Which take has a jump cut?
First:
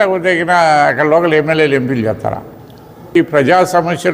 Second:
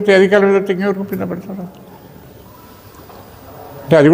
first; 1 cut; at 3.1 s

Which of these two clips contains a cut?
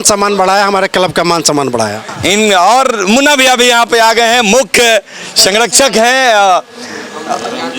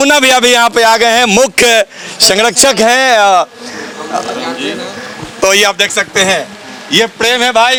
first; 1 cut; at 2.1 s

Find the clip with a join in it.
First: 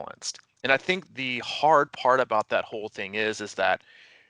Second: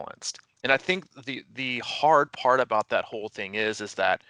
first; 1 cut; at 1.1 s

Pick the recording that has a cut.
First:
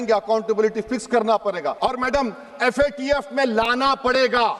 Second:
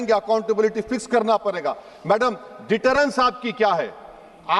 first; 1 cut; at 1.8 s

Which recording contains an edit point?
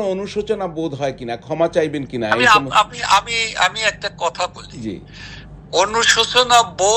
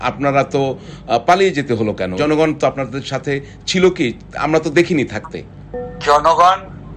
second; 1 cut; at 2.2 s

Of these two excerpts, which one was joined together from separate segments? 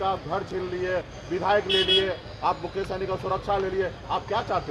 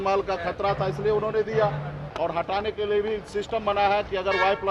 second; 1 cut; at 2.0 s

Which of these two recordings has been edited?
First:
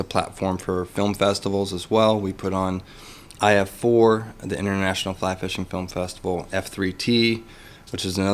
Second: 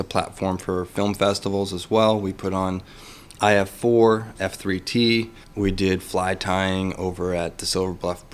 second; 2 cuts; at 4.3 s, 5.4 s

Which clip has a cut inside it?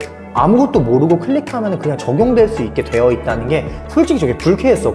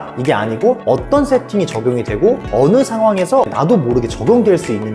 second; 3 cuts; at 0.8 s, 2.4 s, 3.5 s

